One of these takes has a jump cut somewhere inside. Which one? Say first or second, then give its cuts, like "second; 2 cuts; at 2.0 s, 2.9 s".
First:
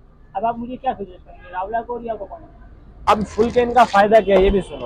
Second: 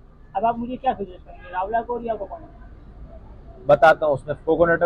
first; 1 cut; at 2.9 s